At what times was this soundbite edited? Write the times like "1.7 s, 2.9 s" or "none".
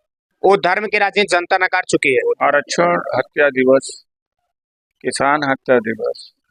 2.4 s